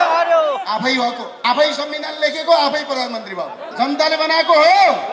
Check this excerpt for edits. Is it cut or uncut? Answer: cut